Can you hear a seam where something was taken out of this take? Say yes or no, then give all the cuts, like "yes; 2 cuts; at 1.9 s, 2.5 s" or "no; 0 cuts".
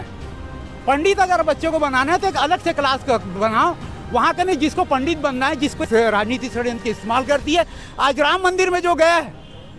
yes; 1 cut; at 5.8 s